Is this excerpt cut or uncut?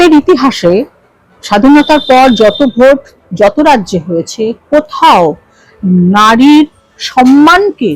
uncut